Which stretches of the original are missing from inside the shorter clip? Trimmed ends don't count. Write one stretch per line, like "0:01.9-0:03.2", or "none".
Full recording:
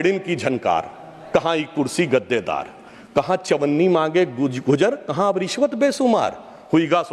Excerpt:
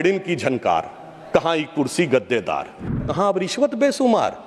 0:03.0-0:05.0